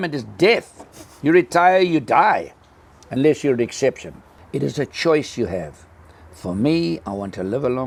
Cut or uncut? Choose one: uncut